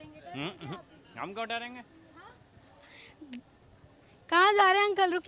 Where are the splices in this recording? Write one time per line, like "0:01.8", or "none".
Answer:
none